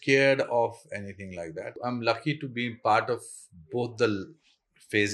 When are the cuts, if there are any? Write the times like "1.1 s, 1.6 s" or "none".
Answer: 1.7 s